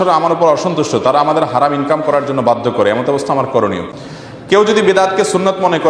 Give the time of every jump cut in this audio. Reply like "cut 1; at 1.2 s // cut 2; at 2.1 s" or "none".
cut 1; at 3.9 s